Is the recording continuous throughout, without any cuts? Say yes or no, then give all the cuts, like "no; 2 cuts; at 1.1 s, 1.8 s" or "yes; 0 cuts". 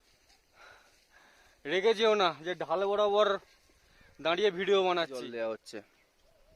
no; 1 cut; at 5.2 s